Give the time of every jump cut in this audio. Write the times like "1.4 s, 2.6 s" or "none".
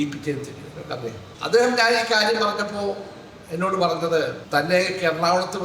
1.3 s, 4.4 s